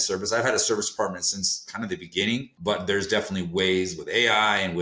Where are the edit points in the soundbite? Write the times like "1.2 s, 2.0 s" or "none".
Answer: 2.6 s